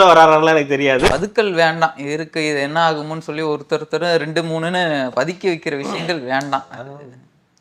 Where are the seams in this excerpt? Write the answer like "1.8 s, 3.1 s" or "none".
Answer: 1.1 s